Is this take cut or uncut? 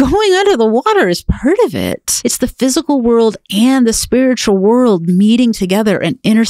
cut